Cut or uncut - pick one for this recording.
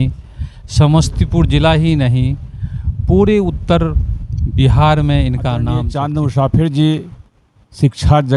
cut